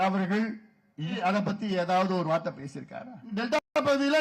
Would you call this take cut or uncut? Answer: cut